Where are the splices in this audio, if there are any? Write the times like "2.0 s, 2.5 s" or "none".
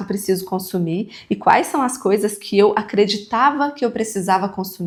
none

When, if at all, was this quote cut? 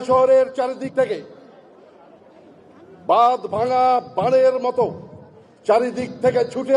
none

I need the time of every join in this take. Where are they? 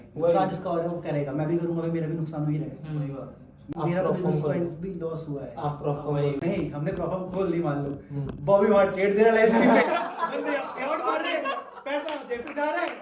3.6 s, 6.4 s

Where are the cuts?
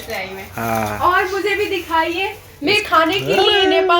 1.0 s

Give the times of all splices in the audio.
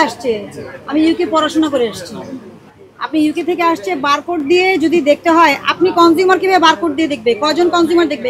none

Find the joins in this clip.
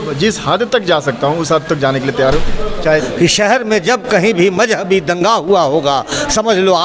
3.1 s

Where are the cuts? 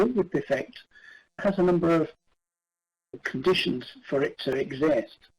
3.2 s

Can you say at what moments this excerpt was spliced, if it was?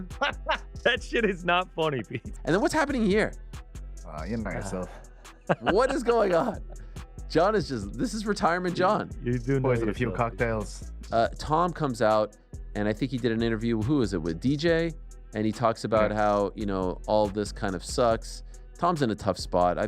2.3 s, 11.0 s

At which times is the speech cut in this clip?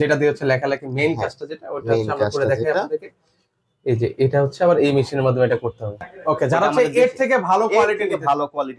6.1 s

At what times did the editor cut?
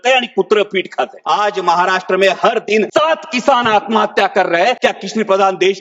1.2 s, 2.9 s, 4.8 s

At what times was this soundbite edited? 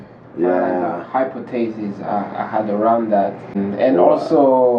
3.6 s

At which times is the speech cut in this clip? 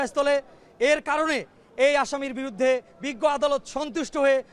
none

